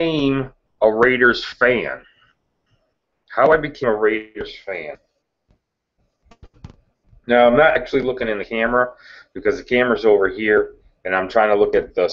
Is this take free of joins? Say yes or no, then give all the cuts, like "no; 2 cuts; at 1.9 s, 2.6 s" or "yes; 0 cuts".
no; 1 cut; at 8.5 s